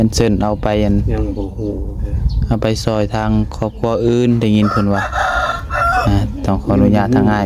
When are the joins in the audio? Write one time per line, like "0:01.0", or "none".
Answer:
none